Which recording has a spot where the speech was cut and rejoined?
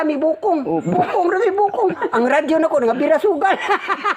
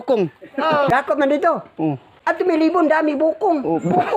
second; 2 cuts; at 0.9 s, 2.1 s

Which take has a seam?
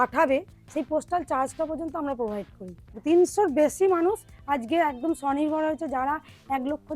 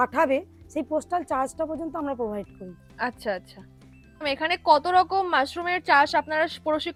first; 1 cut; at 3.0 s

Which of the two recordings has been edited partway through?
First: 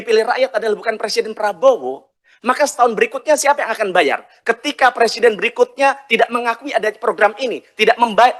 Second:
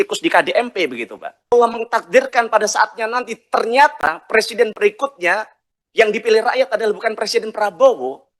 second; 1 cut; at 1.5 s

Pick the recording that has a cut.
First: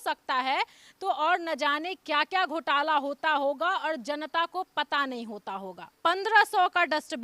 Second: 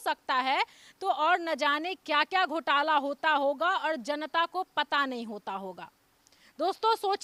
first; 1 cut; at 5.9 s

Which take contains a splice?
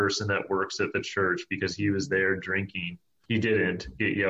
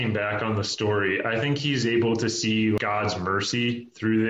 second; 1 cut; at 2.8 s

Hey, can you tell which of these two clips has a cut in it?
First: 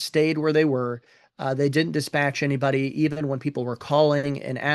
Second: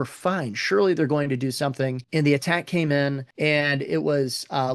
second; 2 cuts; at 2.0 s, 3.3 s

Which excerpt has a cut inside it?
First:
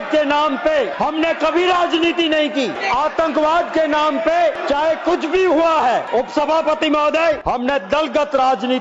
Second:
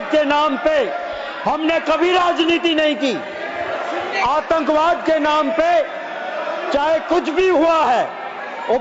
first; 5 cuts; at 0.9 s, 2.8 s, 4.6 s, 6.1 s, 7.4 s

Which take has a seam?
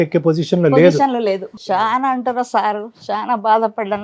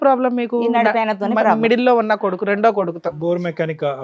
first; 1 cut; at 1.5 s

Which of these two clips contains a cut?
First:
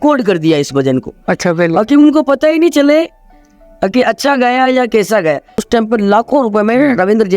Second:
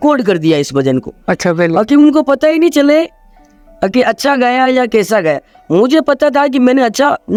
first; 1 cut; at 5.6 s

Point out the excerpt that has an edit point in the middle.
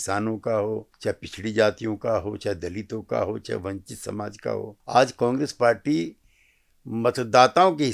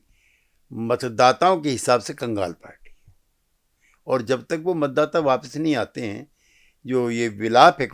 first; 2 cuts; at 0.9 s, 4.8 s

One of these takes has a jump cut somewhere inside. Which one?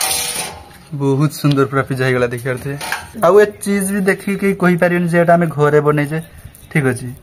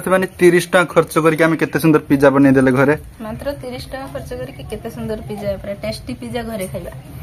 first; 1 cut; at 3.0 s

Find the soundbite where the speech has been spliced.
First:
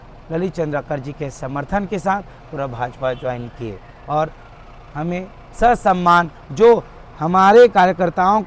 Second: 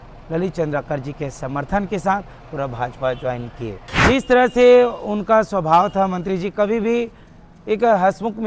second; 1 cut; at 3.9 s

